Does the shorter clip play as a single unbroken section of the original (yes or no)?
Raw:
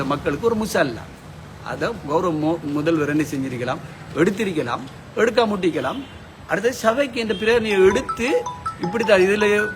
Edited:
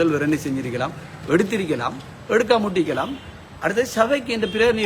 yes